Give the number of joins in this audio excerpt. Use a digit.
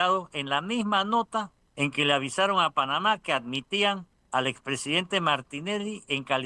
2